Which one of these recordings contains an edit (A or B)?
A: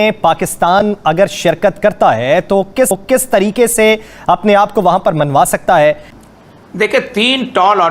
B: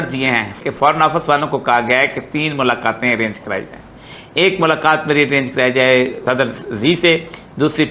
A